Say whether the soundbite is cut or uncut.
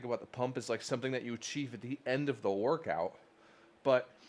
uncut